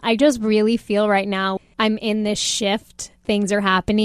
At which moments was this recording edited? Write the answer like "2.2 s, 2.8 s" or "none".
1.6 s, 3.2 s